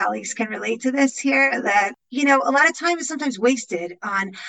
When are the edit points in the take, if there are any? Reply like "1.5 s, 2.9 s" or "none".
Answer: 2.0 s